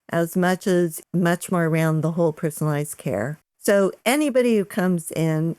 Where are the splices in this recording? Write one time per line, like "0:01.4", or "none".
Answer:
0:01.0
0:03.4